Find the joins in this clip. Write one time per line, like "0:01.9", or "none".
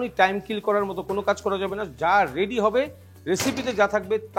none